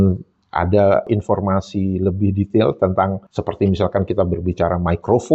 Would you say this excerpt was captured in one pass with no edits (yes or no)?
yes